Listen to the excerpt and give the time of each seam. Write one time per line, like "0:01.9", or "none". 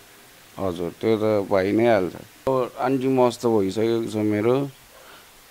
0:02.5